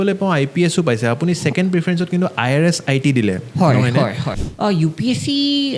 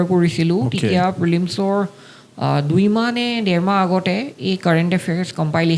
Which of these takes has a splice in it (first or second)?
first